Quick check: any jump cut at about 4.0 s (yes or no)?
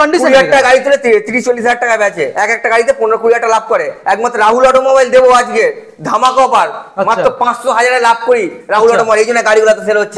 no